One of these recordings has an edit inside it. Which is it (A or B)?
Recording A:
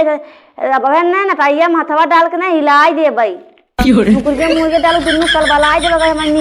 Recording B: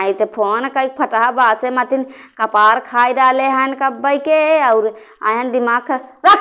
A